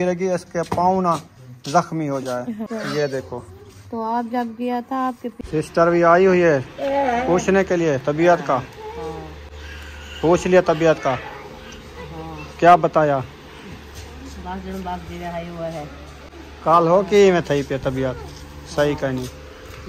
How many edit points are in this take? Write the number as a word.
two